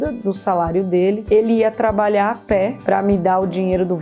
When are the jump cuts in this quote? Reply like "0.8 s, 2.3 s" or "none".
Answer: 1.2 s, 2.8 s